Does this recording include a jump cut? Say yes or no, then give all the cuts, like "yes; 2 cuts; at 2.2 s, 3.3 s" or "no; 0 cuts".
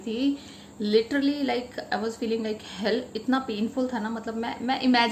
no; 0 cuts